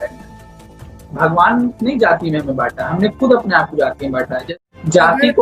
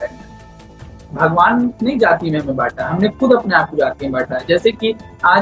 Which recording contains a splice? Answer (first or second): first